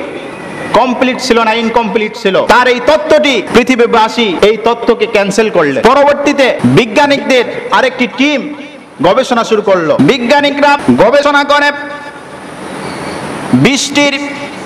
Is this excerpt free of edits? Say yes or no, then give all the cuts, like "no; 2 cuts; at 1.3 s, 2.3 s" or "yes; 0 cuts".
no; 7 cuts; at 2.4 s, 3.5 s, 4.3 s, 5.8 s, 6.6 s, 10.0 s, 10.8 s